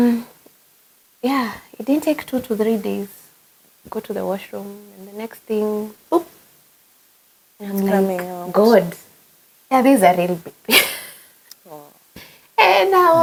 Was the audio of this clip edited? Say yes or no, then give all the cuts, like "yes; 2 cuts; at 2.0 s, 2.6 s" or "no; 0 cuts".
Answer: no; 0 cuts